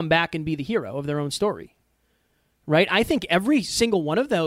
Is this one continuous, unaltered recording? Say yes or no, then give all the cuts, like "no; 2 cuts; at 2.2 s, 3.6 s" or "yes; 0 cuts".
yes; 0 cuts